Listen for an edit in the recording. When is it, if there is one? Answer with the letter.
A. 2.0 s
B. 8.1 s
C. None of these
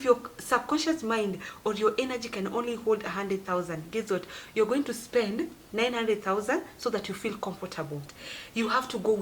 B